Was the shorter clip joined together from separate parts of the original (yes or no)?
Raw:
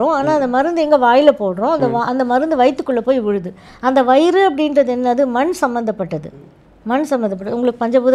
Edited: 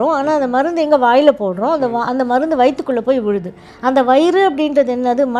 no